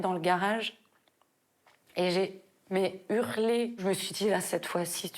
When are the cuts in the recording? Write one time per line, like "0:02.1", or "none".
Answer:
0:03.8